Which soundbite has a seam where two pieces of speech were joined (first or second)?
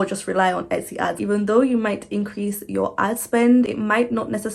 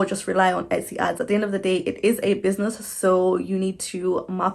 first